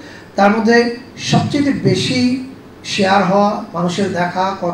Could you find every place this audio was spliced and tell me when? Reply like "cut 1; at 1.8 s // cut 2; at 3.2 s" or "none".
none